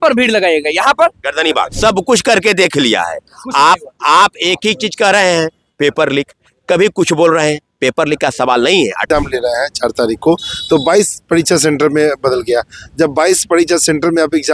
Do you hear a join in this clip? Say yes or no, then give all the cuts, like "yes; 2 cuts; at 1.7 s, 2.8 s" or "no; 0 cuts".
yes; 2 cuts; at 1.7 s, 9.0 s